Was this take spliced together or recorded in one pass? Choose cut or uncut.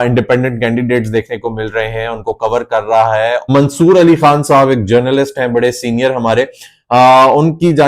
cut